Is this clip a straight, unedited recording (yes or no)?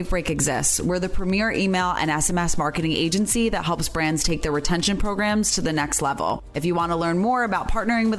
yes